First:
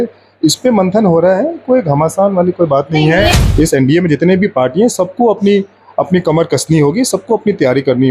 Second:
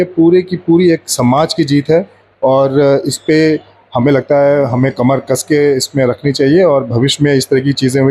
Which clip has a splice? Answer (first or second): first